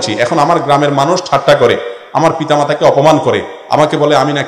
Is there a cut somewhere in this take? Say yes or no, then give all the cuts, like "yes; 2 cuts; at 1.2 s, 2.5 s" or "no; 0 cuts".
no; 0 cuts